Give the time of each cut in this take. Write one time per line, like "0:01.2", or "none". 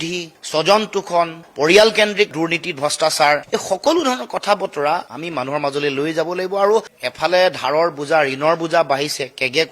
0:06.9